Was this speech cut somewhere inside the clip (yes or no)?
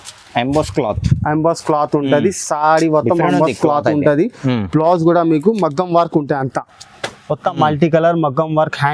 no